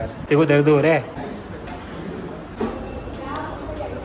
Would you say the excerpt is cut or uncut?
cut